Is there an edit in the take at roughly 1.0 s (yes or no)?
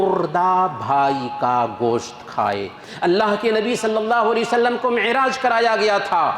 no